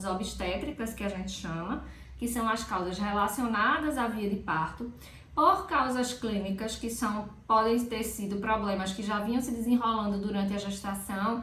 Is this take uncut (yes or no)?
yes